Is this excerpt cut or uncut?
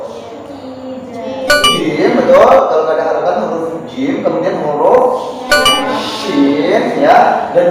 uncut